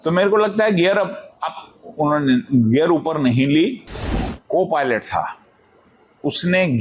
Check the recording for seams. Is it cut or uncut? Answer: cut